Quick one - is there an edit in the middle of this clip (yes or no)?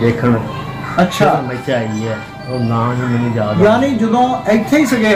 no